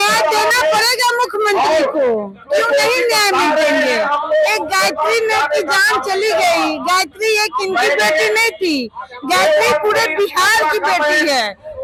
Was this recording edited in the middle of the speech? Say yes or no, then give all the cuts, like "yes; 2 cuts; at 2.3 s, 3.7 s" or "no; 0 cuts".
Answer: no; 0 cuts